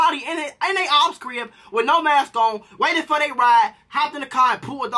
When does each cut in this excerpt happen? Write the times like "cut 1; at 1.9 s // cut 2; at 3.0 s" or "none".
cut 1; at 3.8 s